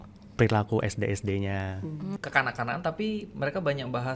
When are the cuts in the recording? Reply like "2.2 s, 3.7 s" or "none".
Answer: 2.1 s